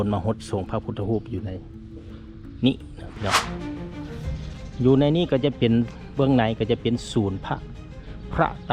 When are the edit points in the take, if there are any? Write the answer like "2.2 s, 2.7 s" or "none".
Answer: 3.4 s